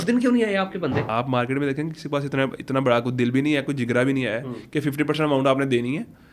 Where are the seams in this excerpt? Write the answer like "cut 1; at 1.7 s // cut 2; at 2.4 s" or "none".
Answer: cut 1; at 1.0 s